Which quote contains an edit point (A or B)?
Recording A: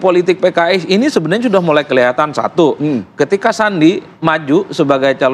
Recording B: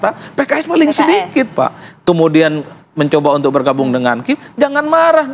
B